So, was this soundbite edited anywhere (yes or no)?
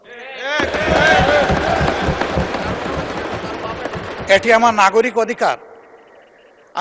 no